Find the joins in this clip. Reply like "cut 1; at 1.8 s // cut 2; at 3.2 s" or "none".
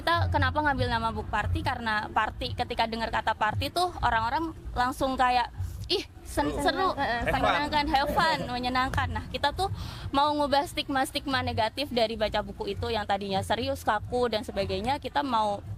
none